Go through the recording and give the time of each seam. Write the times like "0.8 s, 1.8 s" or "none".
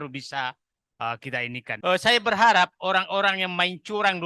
1.7 s